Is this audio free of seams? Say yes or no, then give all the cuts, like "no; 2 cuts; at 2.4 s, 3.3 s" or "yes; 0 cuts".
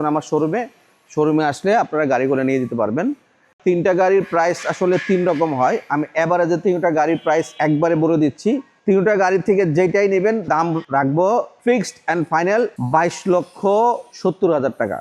no; 7 cuts; at 3.5 s, 7.5 s, 8.7 s, 10.5 s, 11.5 s, 12.8 s, 14.1 s